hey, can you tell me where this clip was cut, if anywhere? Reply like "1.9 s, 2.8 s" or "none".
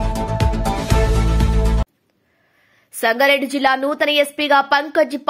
1.9 s